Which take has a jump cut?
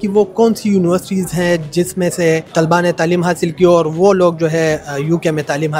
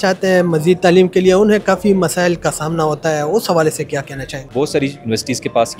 second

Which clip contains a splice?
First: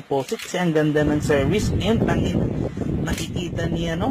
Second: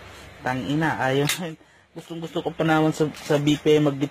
second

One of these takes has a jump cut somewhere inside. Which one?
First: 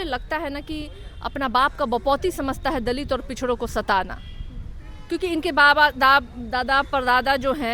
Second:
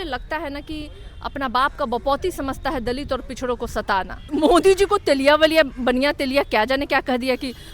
second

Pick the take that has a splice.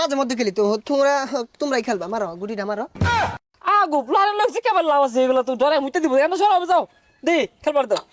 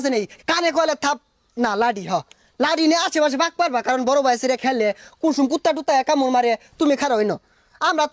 first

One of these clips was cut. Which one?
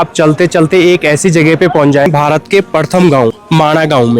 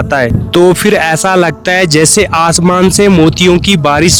first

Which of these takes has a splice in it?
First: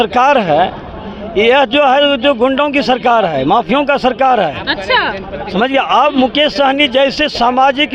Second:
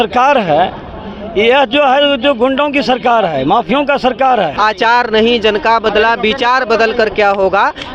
second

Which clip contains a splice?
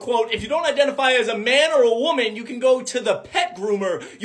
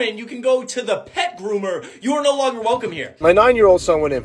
second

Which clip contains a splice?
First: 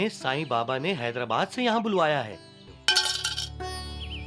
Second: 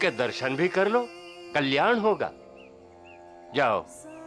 first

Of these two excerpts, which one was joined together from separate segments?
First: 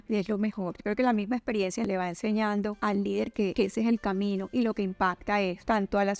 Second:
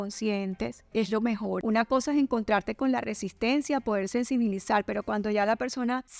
second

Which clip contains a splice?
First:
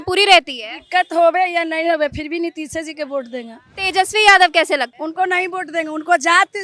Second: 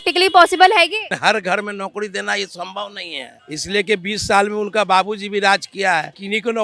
first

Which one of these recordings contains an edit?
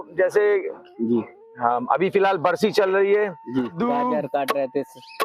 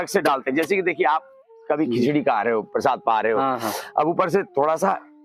first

